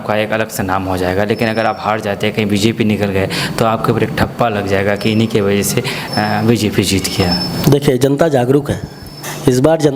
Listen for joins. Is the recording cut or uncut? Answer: uncut